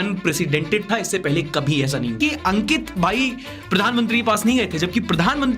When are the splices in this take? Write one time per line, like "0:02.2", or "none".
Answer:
0:02.2